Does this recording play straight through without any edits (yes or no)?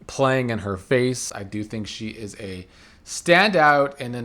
no